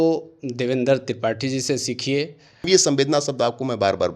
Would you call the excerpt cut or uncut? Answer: cut